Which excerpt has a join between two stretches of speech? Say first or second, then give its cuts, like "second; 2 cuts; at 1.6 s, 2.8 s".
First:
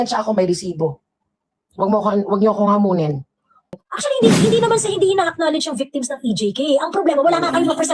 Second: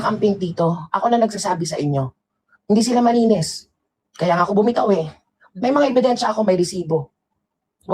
first; 1 cut; at 3.8 s